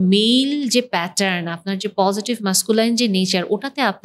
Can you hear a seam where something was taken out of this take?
no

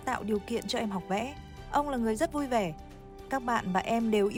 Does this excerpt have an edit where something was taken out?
no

